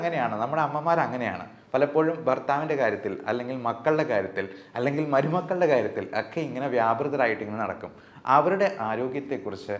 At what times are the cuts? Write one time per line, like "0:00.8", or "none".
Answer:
none